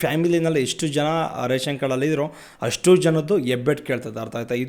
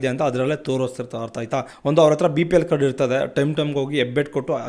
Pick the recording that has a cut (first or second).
second